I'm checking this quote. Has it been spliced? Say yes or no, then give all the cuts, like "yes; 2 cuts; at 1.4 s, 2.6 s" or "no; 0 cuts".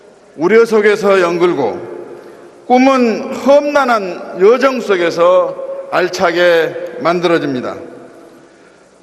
yes; 1 cut; at 1.8 s